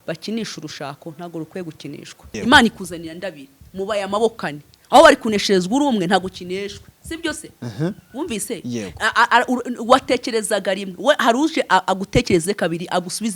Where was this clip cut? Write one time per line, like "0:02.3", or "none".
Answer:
0:02.2